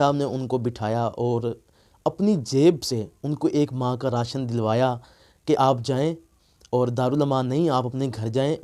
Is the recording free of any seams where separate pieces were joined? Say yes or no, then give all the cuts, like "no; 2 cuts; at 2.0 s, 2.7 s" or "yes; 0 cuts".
yes; 0 cuts